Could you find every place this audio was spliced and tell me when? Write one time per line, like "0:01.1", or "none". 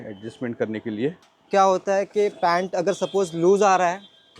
0:01.3